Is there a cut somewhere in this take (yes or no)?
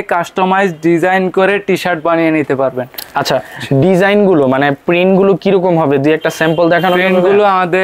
no